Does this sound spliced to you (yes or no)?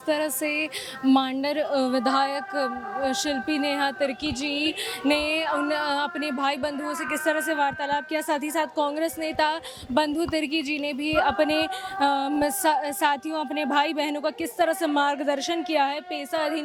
no